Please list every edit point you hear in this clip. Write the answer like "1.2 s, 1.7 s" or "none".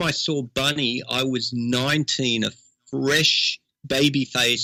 none

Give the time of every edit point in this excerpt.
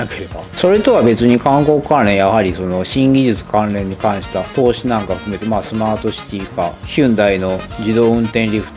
4.5 s

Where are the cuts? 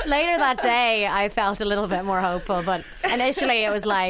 none

